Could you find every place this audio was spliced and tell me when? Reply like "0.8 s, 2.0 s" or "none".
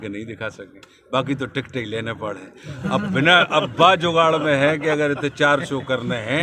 none